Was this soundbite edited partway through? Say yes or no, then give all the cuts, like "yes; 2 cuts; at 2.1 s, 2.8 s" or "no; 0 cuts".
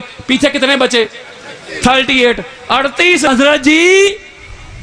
yes; 1 cut; at 3.3 s